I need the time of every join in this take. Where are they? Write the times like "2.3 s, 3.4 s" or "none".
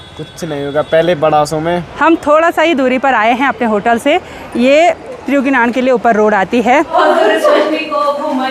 1.9 s, 6.9 s